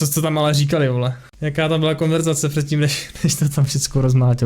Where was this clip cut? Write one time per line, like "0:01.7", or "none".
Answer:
0:01.3